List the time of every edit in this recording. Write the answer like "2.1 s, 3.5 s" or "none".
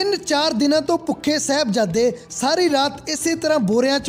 none